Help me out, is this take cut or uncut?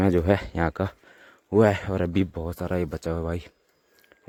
uncut